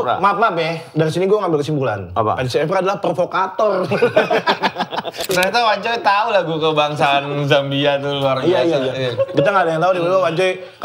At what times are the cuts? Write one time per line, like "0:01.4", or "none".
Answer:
0:05.3

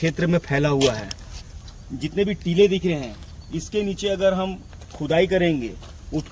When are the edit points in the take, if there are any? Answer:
0:01.7

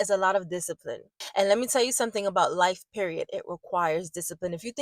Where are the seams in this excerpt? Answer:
0:01.2

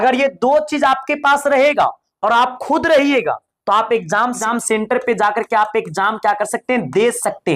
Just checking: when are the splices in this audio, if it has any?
0:04.4

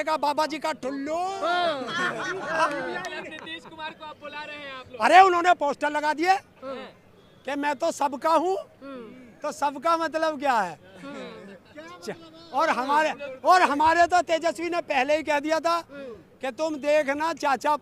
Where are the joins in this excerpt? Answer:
none

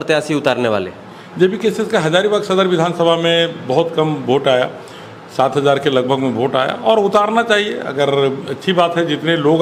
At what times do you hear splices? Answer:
none

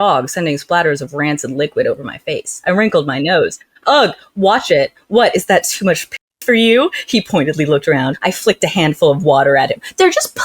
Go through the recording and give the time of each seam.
0:08.2

